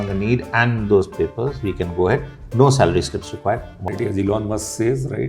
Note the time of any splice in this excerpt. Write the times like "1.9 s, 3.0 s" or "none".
3.9 s